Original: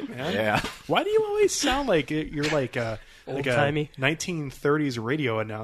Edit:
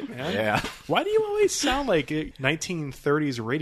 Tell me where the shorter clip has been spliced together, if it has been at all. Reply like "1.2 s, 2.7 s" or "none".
2.3 s